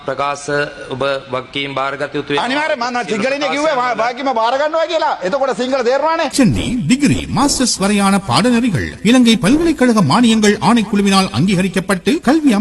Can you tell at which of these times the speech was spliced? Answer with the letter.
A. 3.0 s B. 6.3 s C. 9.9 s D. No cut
B